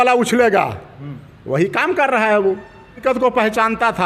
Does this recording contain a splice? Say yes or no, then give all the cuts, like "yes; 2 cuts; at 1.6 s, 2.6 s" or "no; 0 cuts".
yes; 1 cut; at 2.9 s